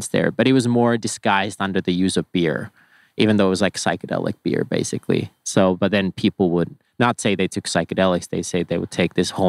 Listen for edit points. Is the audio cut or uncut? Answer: uncut